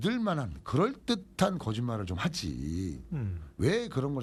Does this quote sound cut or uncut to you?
uncut